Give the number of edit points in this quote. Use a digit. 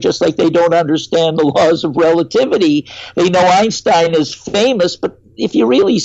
0